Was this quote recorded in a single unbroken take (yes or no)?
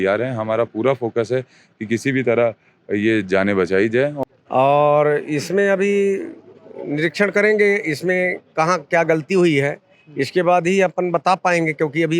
no